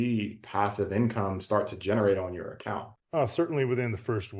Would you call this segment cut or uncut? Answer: uncut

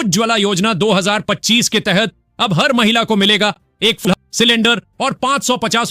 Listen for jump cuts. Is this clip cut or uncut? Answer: cut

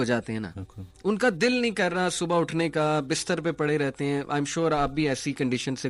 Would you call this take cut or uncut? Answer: uncut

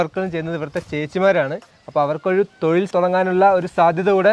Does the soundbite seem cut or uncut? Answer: cut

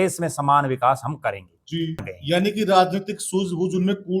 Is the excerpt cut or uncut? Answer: cut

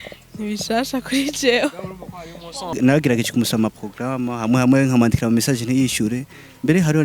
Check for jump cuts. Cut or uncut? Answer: cut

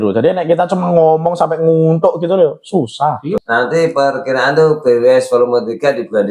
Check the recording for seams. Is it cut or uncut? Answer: cut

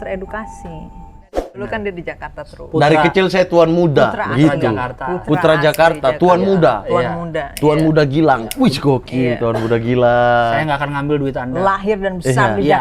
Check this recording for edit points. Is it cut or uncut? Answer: cut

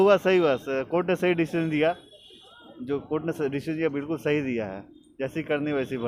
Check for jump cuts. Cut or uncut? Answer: uncut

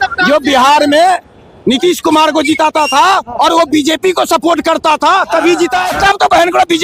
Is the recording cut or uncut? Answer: cut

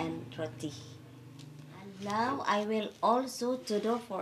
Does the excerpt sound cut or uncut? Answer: cut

